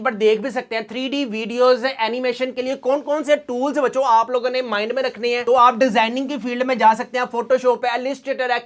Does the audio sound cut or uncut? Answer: cut